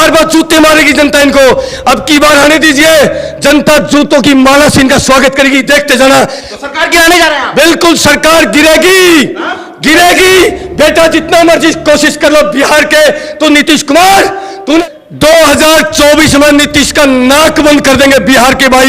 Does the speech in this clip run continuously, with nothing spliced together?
no; 2 cuts; at 6.4 s, 14.8 s

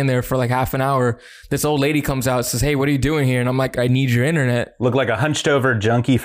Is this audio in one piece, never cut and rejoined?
no; 2 cuts; at 3.8 s, 4.7 s

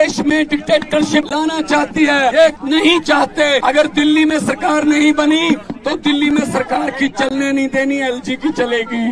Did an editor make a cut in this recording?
yes; 3 cuts; at 1.3 s, 2.5 s, 3.6 s

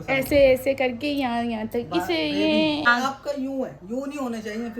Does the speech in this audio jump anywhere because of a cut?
yes; 1 cut; at 2.9 s

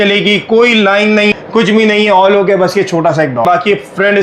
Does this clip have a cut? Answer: yes; 2 cuts; at 1.4 s, 3.4 s

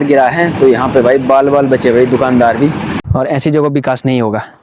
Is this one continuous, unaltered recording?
no; 1 cut; at 2.9 s

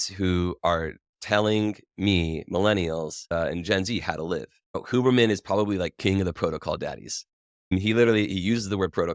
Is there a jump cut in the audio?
yes; 1 cut; at 7.7 s

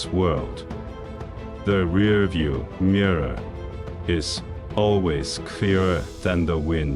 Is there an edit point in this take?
no; 0 cuts

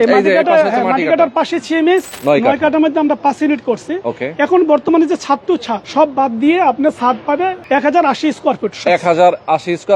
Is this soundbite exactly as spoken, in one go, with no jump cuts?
no; 3 cuts; at 2.1 s, 5.8 s, 7.6 s

